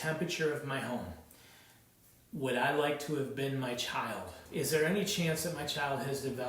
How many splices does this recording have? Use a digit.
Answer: 1